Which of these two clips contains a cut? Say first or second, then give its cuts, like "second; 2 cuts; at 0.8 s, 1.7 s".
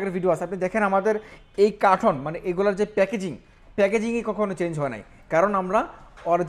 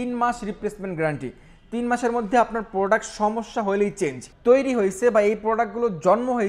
second; 1 cut; at 4.3 s